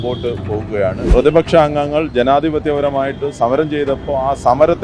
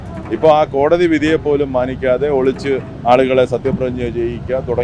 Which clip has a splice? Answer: first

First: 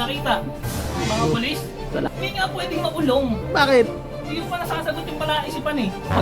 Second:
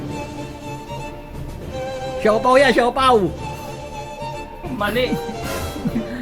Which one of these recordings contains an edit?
first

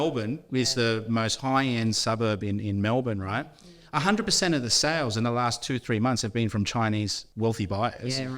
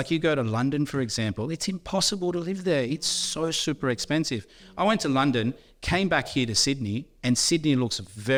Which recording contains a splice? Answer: first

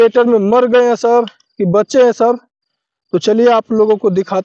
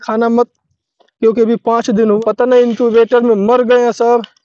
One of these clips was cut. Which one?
second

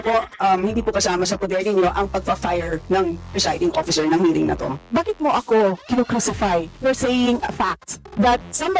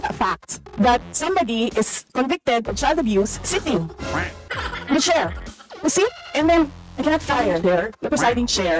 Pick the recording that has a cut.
first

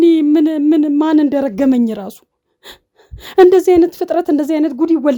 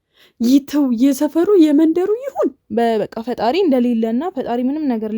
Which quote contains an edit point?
second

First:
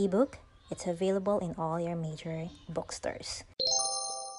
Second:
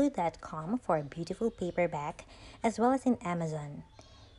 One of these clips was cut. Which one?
first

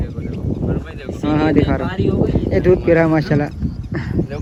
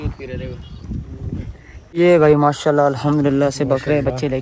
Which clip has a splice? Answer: second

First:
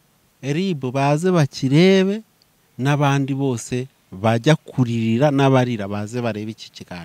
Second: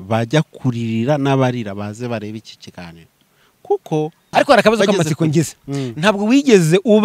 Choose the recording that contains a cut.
second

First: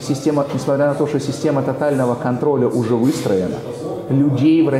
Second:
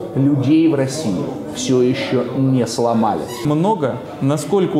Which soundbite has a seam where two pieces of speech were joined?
second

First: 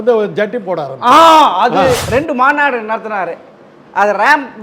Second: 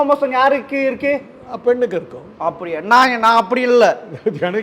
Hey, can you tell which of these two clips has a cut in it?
first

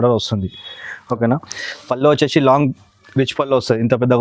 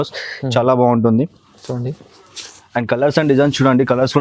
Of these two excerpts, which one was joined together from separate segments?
first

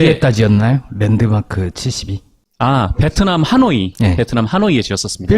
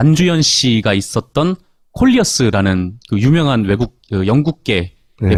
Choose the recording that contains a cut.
first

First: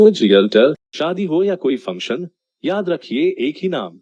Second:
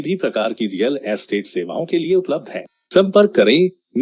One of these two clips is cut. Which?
first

